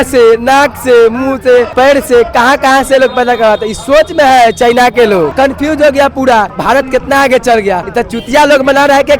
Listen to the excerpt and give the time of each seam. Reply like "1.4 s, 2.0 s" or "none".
1.7 s, 5.3 s, 6.5 s, 7.9 s